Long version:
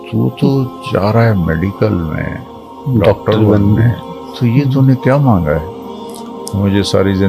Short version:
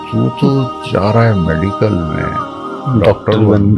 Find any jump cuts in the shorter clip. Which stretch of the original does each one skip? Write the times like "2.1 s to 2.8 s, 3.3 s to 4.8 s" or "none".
none